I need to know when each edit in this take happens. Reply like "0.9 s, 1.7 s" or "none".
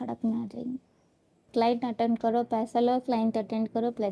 1.5 s